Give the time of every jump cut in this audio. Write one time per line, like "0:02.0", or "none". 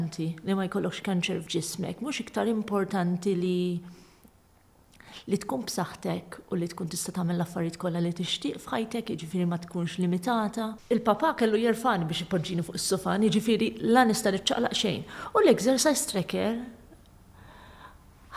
0:01.5
0:10.8